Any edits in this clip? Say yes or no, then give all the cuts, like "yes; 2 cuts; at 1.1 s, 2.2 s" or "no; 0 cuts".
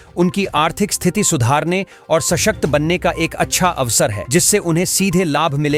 no; 0 cuts